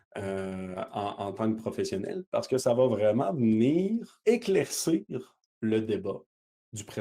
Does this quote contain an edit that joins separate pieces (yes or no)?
yes